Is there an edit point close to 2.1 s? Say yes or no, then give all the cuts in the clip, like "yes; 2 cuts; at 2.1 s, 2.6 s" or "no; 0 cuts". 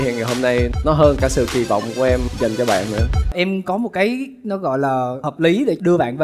no; 1 cut; at 3.3 s